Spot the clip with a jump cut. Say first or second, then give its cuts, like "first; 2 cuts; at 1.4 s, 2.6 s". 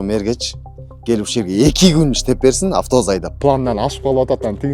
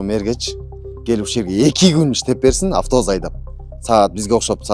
first; 1 cut; at 3.3 s